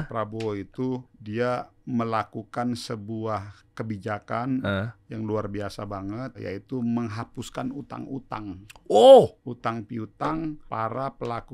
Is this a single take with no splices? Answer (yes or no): no